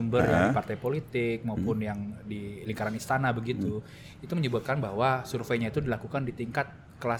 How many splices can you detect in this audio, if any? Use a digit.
0